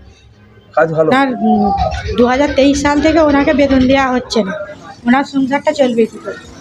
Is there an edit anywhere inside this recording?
yes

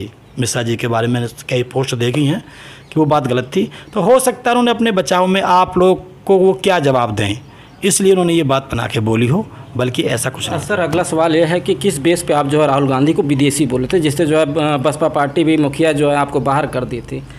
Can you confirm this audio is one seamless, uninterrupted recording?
yes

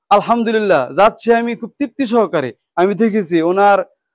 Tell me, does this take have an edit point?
yes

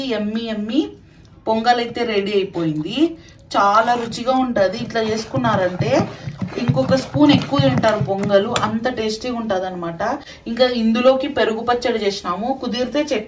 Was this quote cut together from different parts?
no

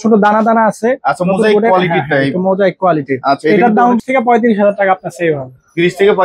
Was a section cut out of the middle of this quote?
yes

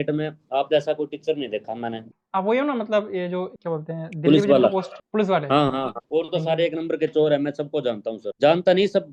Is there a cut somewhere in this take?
yes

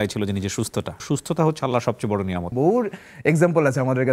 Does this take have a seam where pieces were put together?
yes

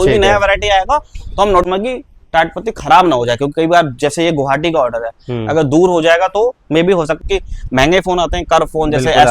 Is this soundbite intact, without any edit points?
no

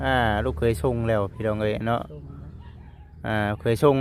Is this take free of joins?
yes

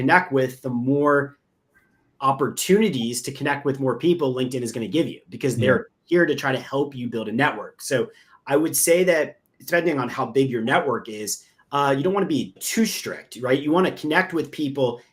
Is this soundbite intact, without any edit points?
yes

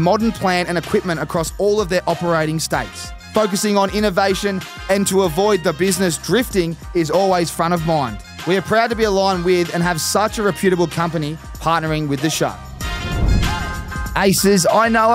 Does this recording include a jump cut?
yes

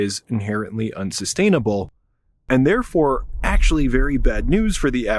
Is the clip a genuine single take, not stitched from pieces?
yes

